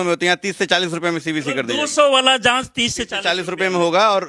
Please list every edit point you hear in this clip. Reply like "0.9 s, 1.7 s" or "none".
none